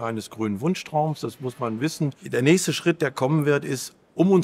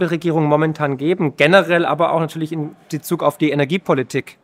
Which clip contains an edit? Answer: first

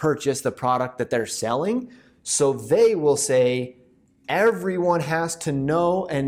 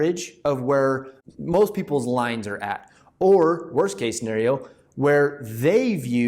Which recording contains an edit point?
second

